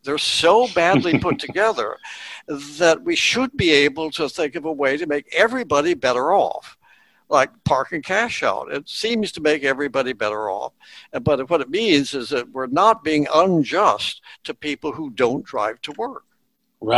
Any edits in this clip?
no; 0 cuts

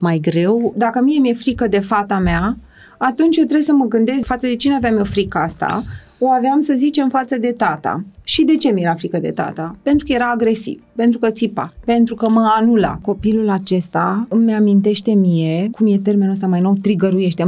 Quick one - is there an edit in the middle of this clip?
yes; 5 cuts; at 0.7 s, 4.2 s, 13.0 s, 14.3 s, 15.7 s

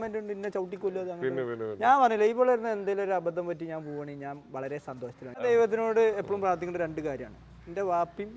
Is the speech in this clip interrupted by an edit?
yes; 1 cut; at 5.4 s

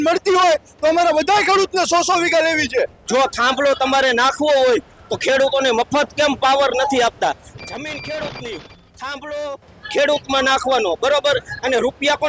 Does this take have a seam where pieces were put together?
yes; 2 cuts; at 3.0 s, 7.5 s

